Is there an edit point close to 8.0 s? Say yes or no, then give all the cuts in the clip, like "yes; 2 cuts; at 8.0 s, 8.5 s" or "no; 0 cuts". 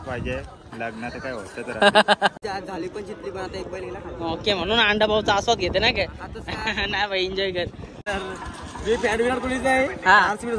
yes; 2 cuts; at 2.4 s, 8.0 s